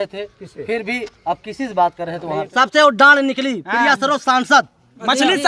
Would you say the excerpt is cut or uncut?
cut